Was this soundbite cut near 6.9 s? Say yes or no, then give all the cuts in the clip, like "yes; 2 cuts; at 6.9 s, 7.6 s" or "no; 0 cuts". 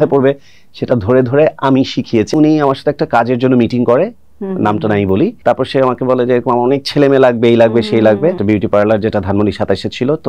no; 3 cuts; at 2.3 s, 5.4 s, 8.4 s